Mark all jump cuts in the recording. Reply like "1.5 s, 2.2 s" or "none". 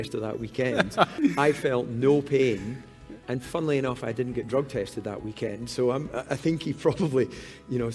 1.1 s